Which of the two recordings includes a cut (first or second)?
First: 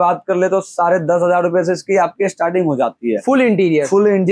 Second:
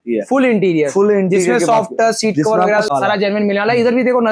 second